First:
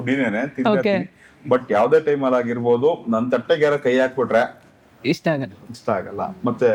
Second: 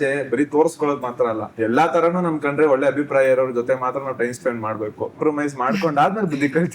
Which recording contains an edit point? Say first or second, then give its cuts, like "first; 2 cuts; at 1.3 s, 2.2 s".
second; 2 cuts; at 1.5 s, 5.2 s